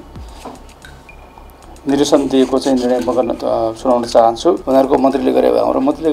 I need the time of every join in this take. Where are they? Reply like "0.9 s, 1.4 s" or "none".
4.6 s